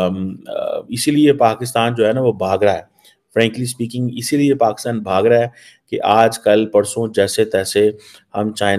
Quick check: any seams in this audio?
no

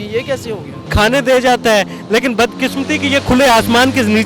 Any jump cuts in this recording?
yes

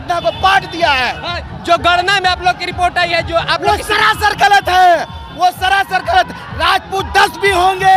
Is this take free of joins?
yes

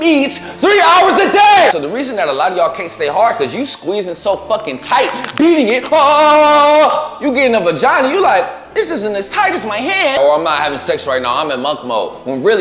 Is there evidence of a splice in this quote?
yes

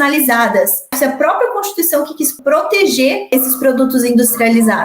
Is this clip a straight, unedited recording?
no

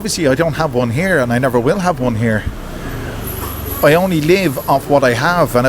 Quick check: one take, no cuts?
yes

